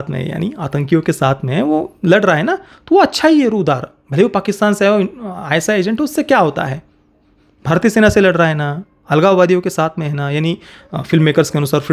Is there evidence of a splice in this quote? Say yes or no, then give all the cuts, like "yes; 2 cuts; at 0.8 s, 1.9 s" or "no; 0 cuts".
no; 0 cuts